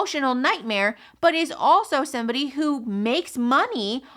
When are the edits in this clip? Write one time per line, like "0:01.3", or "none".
none